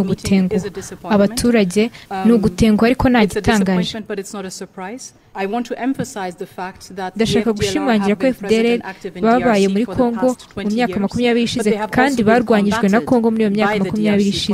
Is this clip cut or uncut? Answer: cut